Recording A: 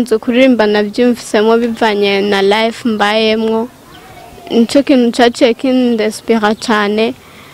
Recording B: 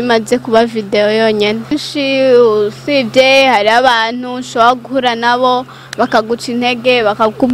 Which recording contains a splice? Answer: B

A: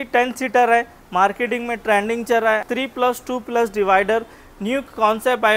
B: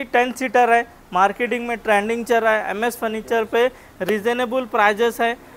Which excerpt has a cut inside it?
A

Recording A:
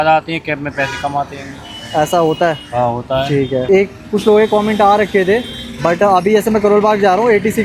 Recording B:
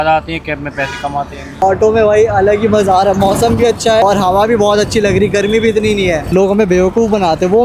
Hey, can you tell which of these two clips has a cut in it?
B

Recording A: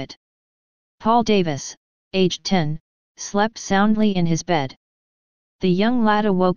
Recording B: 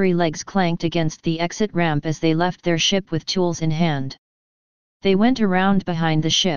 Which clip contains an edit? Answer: B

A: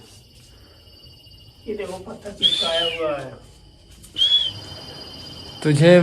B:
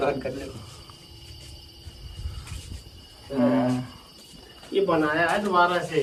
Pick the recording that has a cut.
A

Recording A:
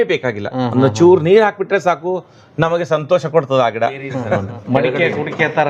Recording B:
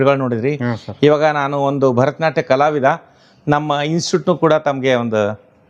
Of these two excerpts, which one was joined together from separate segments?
A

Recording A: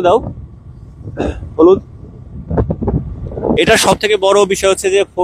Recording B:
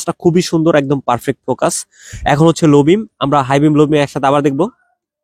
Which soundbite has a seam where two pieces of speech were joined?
A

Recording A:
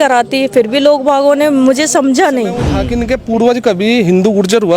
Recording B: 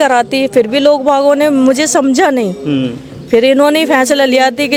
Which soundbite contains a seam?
A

